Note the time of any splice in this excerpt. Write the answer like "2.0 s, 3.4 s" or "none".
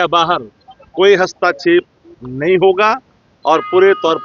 none

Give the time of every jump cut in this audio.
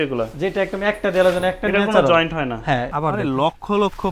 2.9 s

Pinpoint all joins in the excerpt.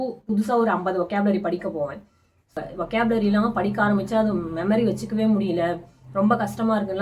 2.6 s

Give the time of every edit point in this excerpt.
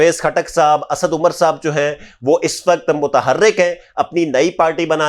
none

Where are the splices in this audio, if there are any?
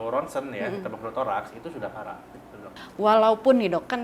2.8 s

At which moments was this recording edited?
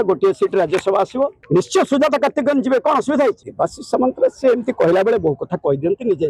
1.4 s, 3.5 s

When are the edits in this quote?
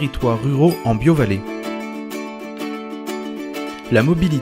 1.4 s, 3.3 s

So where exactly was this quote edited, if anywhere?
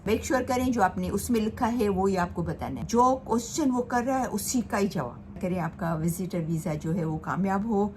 2.7 s, 5.4 s

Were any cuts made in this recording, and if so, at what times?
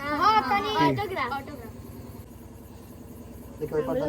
2.3 s

